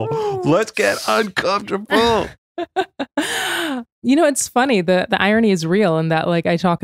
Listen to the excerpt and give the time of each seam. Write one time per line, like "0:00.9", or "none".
0:02.4
0:03.9

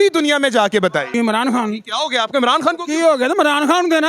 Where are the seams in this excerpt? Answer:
0:01.1

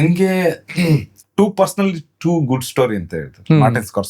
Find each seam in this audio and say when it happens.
0:01.2

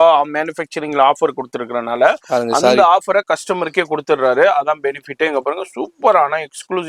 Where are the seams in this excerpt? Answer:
none

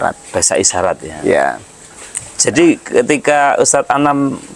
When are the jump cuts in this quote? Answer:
none

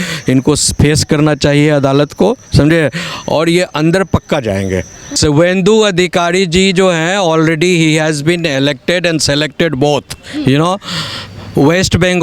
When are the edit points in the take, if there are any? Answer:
0:05.1

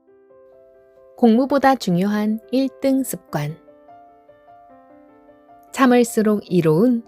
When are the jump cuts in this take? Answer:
0:01.2

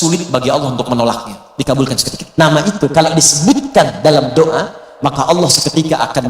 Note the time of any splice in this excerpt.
0:02.2

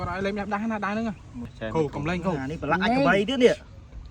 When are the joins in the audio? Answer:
0:01.5

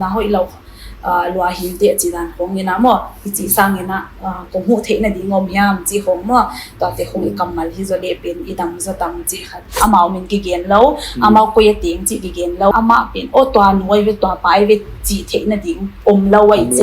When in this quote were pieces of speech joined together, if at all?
0:09.8
0:12.7

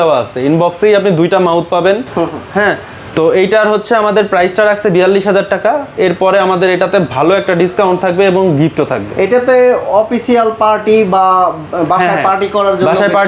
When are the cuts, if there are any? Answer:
none

